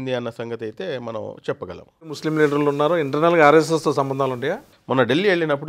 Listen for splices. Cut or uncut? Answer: cut